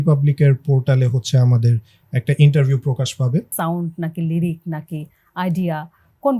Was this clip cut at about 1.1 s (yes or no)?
no